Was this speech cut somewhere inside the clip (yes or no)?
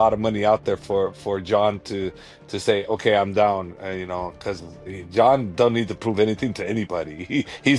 no